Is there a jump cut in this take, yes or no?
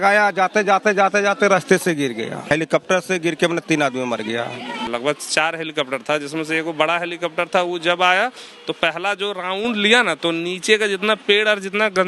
yes